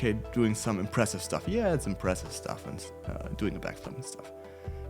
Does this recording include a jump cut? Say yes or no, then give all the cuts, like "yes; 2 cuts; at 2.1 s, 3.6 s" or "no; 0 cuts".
no; 0 cuts